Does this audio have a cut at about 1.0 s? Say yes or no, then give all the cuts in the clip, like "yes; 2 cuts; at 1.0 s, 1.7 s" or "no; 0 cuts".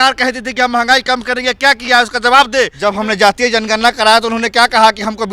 no; 1 cut; at 2.7 s